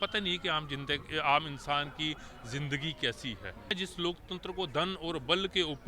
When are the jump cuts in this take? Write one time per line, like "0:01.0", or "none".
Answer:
0:03.8